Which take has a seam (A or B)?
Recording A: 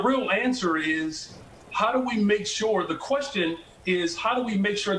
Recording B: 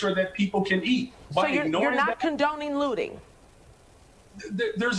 B